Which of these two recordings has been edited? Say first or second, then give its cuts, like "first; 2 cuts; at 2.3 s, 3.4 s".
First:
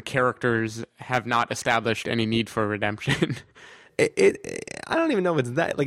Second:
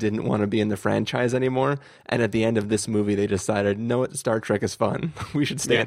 first; 1 cut; at 3.9 s